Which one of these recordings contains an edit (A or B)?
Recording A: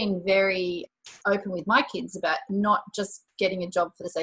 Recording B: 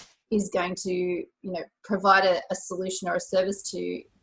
A